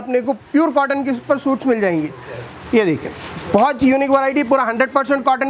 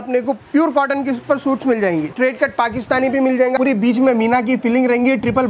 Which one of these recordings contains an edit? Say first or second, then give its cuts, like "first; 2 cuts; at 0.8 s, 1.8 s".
second; 2 cuts; at 2.1 s, 3.5 s